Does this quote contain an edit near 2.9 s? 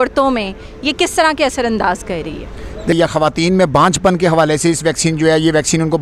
yes; 1 cut; at 2.9 s

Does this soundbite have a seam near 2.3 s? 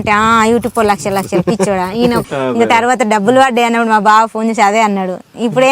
yes; 1 cut; at 2.3 s

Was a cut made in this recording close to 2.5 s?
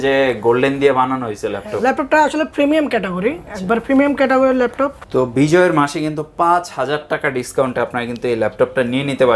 no; 1 cut; at 5.0 s

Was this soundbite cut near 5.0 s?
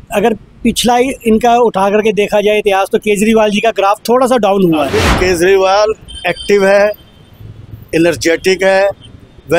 yes; 1 cut; at 5.0 s

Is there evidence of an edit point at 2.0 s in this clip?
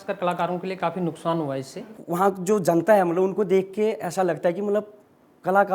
yes; 1 cut; at 2.0 s

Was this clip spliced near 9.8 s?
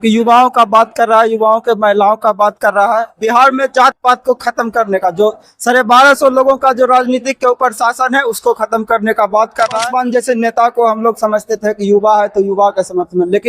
yes; 1 cut; at 9.8 s

